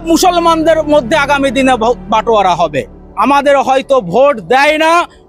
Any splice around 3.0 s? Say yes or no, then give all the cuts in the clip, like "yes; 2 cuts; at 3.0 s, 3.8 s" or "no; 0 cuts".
yes; 1 cut; at 3.0 s